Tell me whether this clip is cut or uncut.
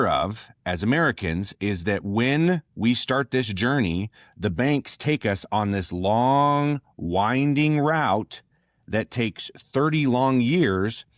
uncut